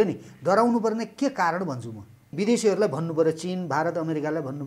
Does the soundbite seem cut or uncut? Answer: cut